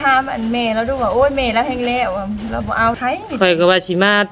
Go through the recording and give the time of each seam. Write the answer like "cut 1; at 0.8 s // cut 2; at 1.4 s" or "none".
cut 1; at 3.0 s